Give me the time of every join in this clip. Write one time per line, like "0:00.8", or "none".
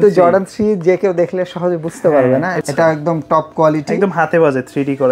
0:02.6